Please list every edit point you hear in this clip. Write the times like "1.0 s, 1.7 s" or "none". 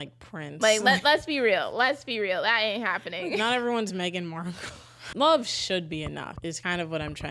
5.0 s, 6.5 s